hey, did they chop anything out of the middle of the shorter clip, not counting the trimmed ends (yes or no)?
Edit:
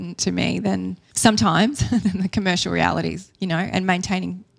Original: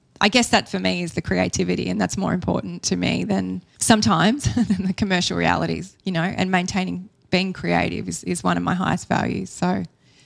no